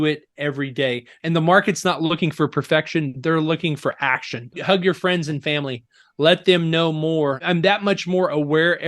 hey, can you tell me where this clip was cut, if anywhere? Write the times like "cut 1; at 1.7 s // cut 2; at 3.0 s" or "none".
cut 1; at 1.1 s // cut 2; at 4.6 s // cut 3; at 7.4 s